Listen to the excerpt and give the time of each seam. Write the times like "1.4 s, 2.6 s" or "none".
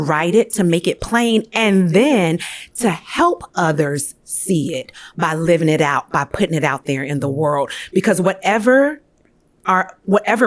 none